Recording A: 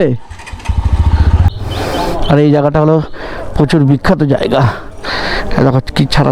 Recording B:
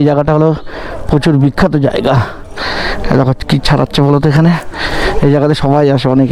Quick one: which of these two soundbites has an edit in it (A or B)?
A